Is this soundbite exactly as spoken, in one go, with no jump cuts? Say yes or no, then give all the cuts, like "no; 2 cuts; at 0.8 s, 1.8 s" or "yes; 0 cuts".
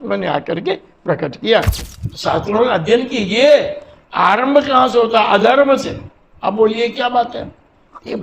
no; 1 cut; at 1.8 s